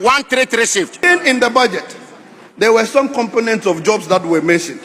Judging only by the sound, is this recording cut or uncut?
cut